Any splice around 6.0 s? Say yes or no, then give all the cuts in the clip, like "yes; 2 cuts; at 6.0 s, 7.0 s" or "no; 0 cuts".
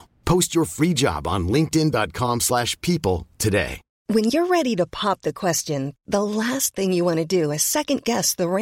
no; 1 cut; at 3.8 s